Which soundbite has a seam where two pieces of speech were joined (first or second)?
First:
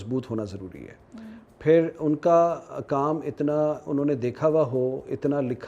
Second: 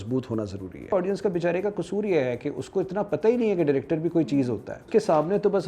second